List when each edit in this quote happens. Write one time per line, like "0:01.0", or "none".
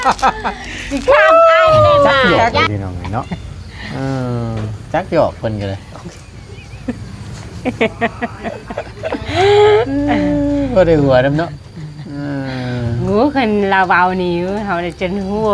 0:02.6